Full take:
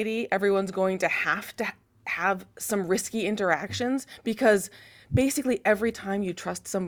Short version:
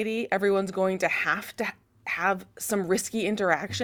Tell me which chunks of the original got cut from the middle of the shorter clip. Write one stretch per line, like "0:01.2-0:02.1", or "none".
none